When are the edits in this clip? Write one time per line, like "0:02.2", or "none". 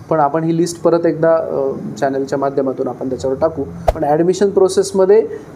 0:03.8